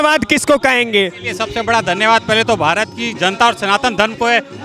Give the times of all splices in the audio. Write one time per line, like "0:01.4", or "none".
none